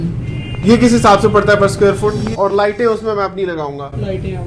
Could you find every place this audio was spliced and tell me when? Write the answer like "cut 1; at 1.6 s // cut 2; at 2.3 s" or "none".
cut 1; at 2.3 s